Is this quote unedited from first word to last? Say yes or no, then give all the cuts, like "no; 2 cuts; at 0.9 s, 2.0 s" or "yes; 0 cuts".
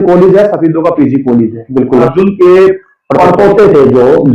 no; 1 cut; at 2.1 s